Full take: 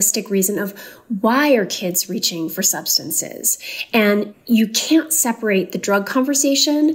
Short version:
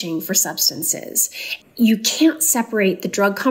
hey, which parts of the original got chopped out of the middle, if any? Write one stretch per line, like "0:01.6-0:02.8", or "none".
0:03.9-0:04.3